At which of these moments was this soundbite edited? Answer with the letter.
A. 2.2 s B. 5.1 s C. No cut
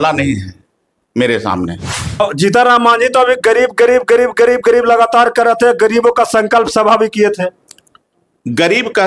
A